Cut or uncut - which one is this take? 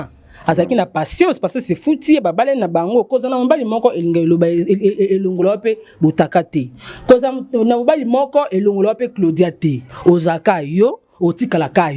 uncut